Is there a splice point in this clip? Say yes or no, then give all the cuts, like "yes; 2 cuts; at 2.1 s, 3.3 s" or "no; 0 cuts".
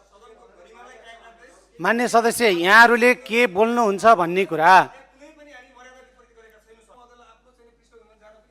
yes; 1 cut; at 6.9 s